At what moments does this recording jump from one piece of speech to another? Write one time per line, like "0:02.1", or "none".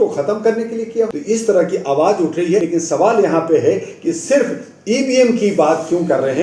0:01.1
0:02.7

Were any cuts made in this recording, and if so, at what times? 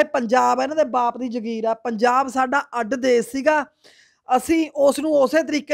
none

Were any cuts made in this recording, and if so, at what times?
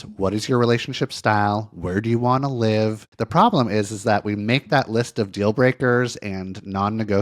0:03.1

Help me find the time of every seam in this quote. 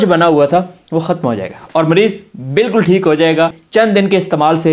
0:03.6

